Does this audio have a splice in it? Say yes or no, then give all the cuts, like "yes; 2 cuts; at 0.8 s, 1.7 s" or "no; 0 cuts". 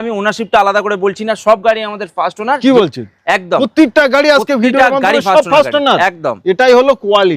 no; 0 cuts